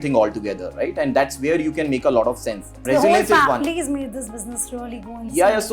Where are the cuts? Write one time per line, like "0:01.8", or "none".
0:02.8